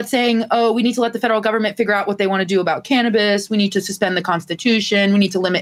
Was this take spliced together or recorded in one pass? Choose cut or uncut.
uncut